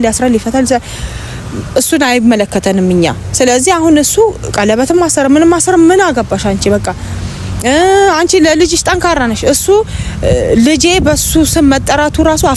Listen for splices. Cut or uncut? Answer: uncut